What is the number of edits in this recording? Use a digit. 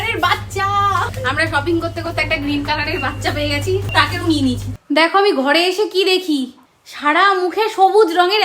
2